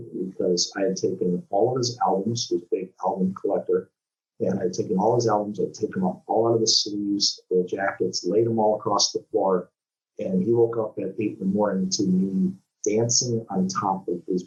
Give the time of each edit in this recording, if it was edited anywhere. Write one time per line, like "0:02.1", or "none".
none